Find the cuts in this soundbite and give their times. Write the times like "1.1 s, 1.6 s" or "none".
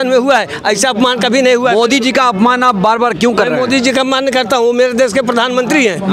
none